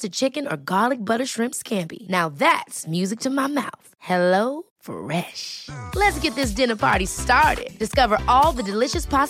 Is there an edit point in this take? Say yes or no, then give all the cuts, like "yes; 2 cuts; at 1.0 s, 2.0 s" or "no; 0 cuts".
no; 0 cuts